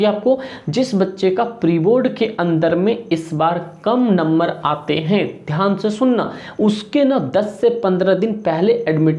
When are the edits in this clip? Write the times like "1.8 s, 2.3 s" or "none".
none